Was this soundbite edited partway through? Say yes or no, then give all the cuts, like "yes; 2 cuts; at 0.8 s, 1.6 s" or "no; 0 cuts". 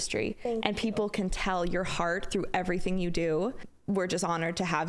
yes; 1 cut; at 3.7 s